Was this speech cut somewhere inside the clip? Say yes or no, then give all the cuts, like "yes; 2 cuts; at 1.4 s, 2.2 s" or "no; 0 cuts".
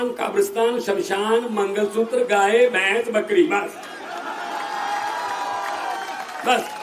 no; 0 cuts